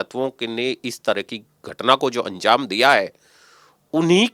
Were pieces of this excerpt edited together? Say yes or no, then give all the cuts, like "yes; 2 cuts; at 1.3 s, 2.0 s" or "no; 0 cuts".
no; 0 cuts